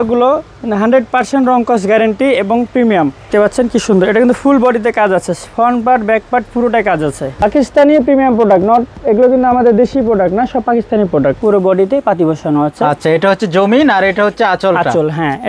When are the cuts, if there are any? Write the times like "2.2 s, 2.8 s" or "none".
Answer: 3.2 s, 7.4 s, 11.4 s